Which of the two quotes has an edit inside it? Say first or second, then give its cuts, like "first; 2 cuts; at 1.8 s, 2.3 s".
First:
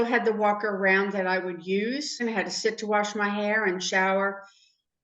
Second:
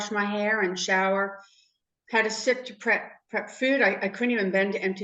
first; 1 cut; at 2.1 s